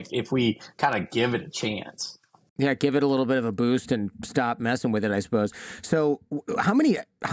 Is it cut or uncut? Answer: uncut